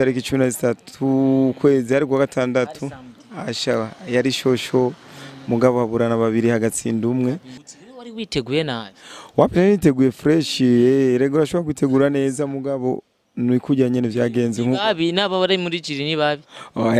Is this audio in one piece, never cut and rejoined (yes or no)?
no